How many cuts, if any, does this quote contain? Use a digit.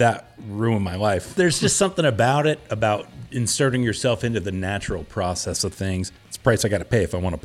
2